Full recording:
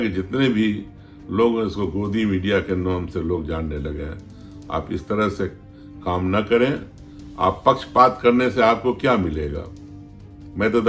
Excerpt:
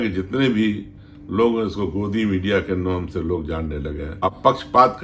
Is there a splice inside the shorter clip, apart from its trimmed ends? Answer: yes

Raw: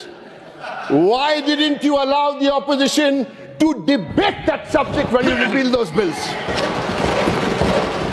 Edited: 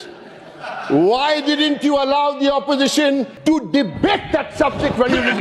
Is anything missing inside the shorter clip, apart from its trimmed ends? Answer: yes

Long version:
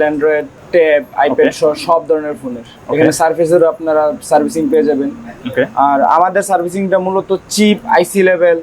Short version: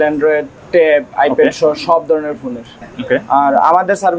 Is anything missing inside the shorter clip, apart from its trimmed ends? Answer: yes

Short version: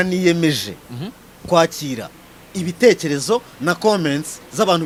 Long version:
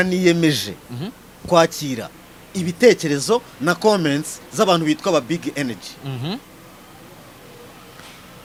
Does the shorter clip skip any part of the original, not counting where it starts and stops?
no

